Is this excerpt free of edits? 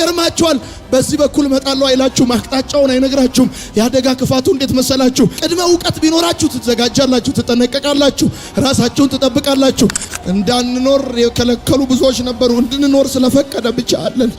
no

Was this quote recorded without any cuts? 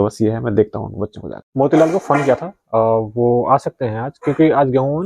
no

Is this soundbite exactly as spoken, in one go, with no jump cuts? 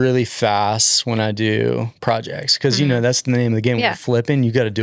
yes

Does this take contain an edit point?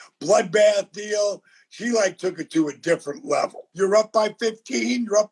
yes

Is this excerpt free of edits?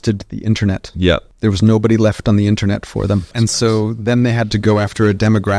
no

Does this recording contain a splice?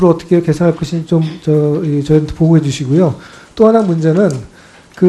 yes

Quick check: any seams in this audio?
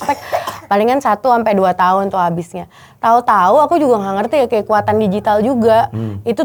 no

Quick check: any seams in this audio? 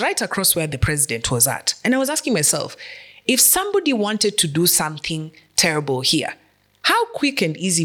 no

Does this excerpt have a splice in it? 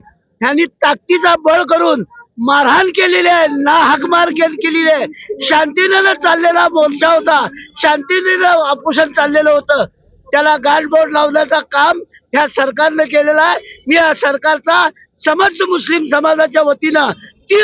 no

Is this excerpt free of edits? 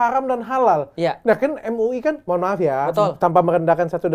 yes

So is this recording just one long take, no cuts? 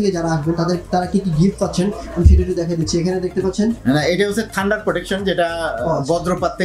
yes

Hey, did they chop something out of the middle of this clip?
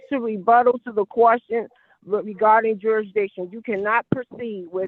no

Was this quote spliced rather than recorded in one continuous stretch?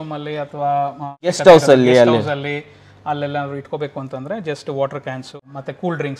yes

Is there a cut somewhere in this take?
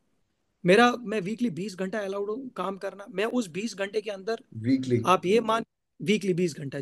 no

